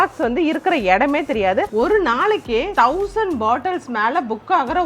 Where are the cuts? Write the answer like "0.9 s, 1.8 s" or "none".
1.7 s, 2.7 s